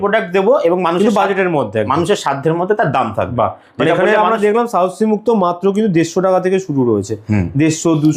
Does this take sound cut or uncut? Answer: uncut